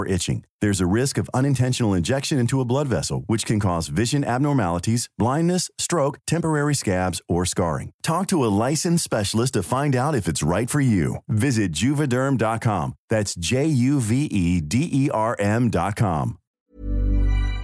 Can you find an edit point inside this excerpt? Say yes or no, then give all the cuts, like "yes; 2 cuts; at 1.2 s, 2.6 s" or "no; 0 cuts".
yes; 1 cut; at 16.5 s